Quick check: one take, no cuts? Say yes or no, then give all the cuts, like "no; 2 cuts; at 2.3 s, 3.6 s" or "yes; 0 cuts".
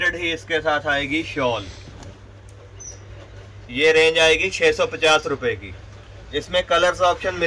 yes; 0 cuts